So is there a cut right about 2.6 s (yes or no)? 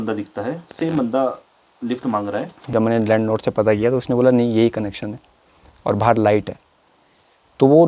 yes